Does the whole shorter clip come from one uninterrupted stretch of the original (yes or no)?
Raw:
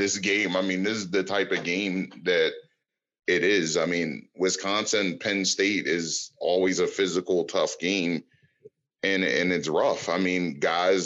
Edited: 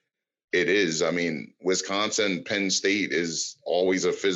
yes